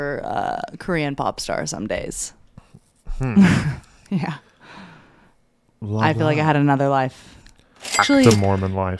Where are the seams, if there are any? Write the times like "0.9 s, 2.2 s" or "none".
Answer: 8.0 s

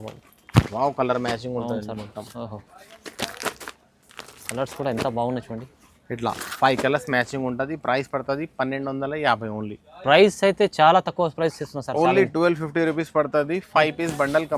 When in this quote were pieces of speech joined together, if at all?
none

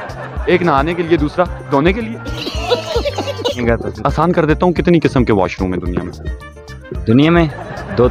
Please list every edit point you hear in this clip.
3.6 s

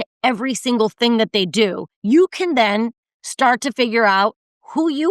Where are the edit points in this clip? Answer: 1.9 s

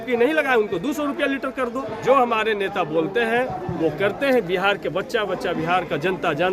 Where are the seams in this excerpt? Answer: 1.9 s

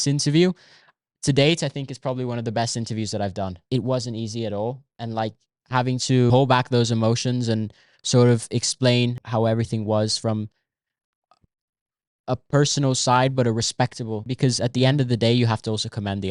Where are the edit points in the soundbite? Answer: 3.6 s, 6.3 s, 9.2 s, 14.3 s

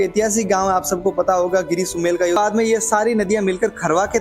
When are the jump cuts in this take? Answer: 2.4 s

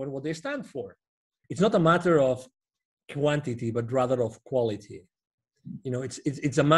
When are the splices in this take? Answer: 1.3 s

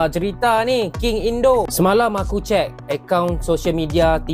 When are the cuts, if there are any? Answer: 1.7 s

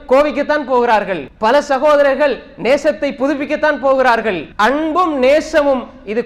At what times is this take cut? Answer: 1.2 s, 4.4 s

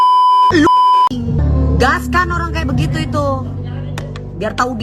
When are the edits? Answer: 1.4 s

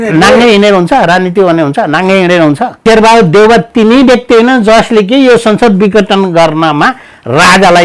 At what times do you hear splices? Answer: 2.7 s

